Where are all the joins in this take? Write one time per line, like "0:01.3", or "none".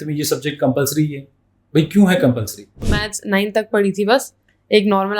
0:03.0